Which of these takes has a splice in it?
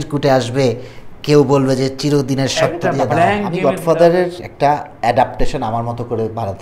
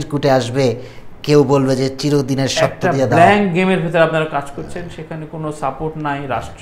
first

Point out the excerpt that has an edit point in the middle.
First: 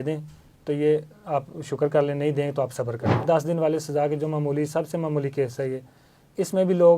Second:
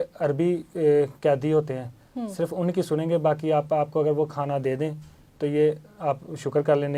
first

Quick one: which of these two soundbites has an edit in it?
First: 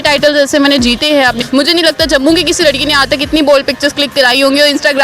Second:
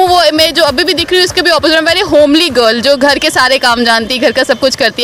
first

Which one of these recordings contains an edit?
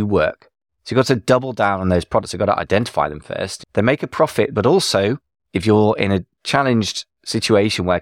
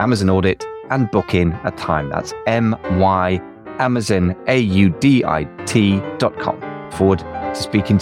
second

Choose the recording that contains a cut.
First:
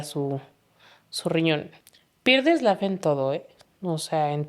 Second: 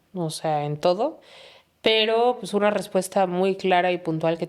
first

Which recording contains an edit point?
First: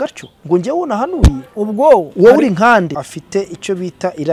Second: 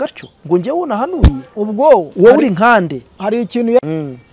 first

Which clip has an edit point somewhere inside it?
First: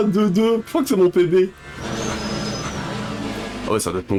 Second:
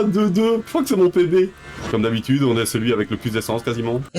second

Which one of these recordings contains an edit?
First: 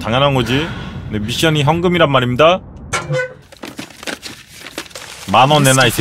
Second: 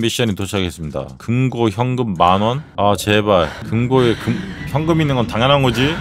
second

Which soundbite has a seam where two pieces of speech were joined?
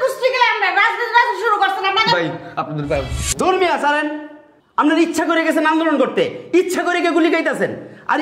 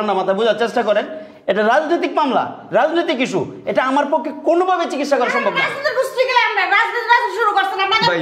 first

